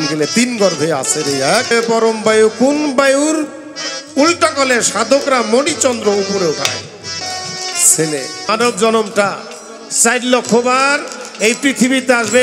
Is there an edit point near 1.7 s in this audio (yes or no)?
yes